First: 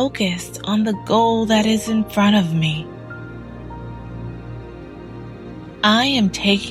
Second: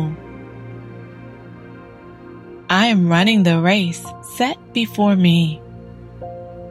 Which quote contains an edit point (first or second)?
second